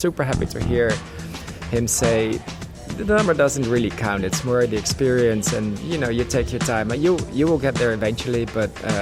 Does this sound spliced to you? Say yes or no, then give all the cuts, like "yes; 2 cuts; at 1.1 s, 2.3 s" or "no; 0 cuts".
no; 0 cuts